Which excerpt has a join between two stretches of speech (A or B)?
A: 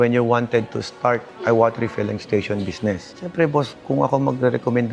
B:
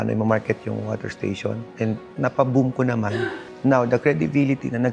B